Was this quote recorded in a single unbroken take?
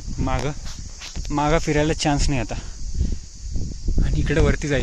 yes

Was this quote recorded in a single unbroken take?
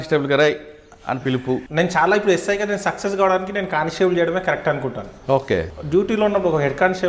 no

